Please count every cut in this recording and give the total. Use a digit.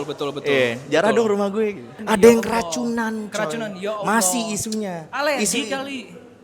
1